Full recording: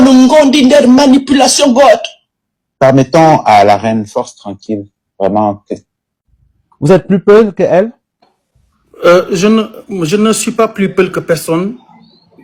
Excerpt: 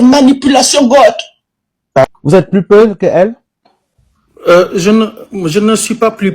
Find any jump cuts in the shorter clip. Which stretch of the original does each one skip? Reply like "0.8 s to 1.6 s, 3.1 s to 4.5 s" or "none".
2.9 s to 6.6 s